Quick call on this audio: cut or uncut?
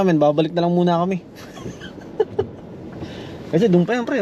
uncut